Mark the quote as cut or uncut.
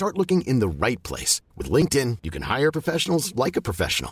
uncut